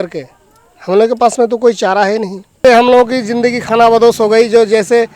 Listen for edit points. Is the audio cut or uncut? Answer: cut